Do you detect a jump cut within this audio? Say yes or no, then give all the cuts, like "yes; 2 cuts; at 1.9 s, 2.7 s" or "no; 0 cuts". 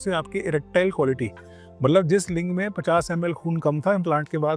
no; 0 cuts